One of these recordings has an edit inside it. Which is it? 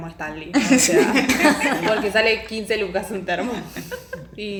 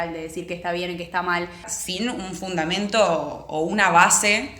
second; 1 cut; at 1.7 s

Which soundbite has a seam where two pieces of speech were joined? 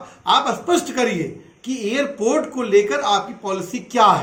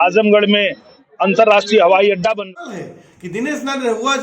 second; 1 cut; at 2.4 s

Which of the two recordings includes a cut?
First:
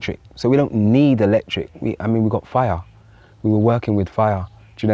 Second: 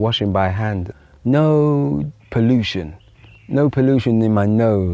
second; 1 cut; at 0.9 s

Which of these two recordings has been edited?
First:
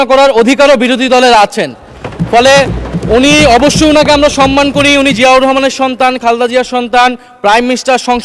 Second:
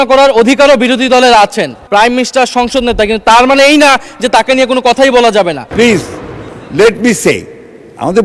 second; 2 cuts; at 1.8 s, 5.7 s

